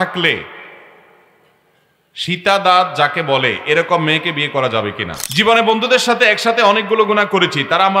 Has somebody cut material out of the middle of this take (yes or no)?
yes